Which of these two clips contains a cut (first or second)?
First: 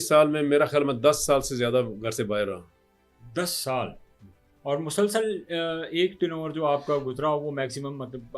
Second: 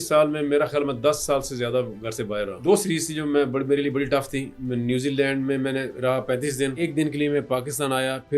second